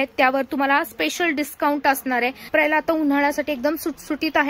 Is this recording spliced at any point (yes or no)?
yes